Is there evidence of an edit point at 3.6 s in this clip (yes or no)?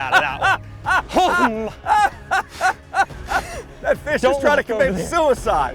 yes